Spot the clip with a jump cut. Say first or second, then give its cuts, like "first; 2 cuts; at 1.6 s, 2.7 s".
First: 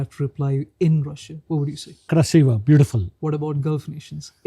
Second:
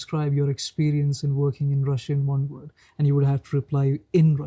first; 2 cuts; at 2.1 s, 3.1 s